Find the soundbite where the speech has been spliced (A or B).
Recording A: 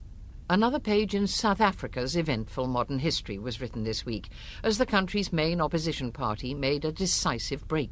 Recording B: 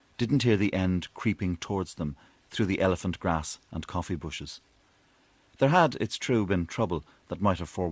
A